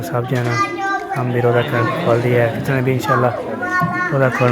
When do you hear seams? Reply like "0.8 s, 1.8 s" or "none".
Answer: none